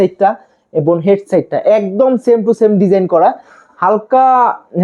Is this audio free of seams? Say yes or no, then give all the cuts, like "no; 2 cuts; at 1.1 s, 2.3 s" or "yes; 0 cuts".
yes; 0 cuts